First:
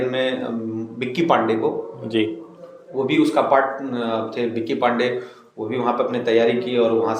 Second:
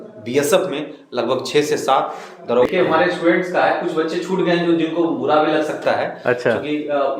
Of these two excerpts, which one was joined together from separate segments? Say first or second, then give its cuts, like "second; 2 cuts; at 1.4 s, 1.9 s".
second; 1 cut; at 2.7 s